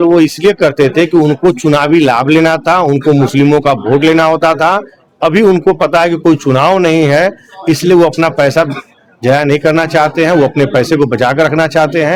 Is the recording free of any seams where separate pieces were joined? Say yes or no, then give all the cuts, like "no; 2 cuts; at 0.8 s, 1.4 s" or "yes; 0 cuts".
yes; 0 cuts